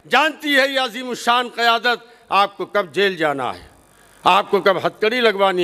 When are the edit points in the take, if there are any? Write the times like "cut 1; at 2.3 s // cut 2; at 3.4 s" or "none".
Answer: none